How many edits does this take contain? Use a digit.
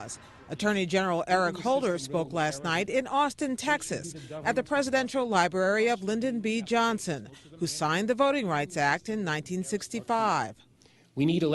1